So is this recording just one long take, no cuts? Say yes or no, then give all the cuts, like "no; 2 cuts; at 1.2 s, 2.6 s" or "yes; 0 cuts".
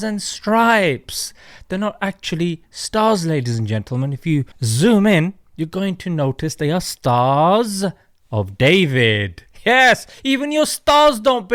yes; 0 cuts